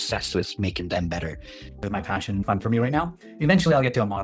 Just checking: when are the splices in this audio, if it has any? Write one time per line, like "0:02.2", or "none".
0:01.8